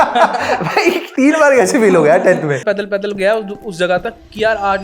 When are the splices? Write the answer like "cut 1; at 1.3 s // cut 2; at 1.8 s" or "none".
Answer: cut 1; at 1.1 s // cut 2; at 2.6 s